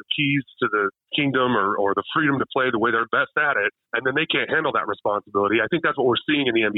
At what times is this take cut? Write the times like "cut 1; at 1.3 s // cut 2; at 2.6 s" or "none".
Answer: cut 1; at 3.8 s